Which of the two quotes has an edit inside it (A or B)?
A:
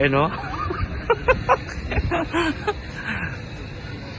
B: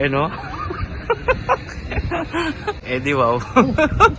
B